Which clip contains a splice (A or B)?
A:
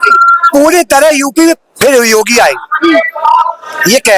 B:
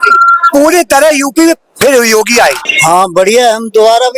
B